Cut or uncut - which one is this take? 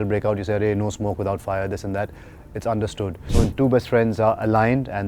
cut